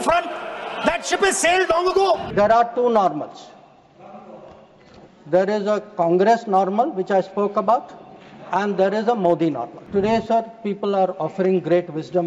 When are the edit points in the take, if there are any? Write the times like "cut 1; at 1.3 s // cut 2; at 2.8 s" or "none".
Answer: cut 1; at 2.3 s // cut 2; at 9.7 s